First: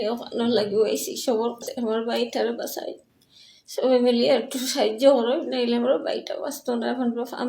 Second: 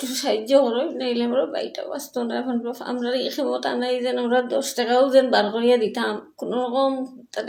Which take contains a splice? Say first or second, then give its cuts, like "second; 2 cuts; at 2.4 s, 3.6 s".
first; 1 cut; at 1.6 s